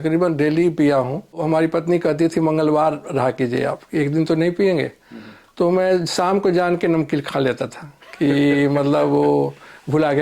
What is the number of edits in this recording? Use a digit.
1